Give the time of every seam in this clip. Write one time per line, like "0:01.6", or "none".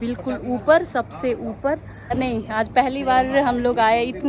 0:02.1